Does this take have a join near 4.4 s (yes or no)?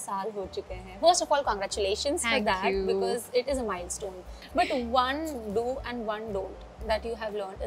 yes